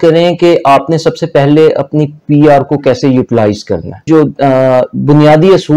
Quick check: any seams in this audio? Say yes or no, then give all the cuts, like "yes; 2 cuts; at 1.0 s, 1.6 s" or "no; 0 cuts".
yes; 1 cut; at 4.0 s